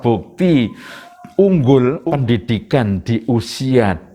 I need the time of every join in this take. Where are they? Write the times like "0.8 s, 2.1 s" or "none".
2.0 s